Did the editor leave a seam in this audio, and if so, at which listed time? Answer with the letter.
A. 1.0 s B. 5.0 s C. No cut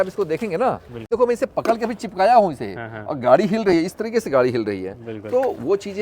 A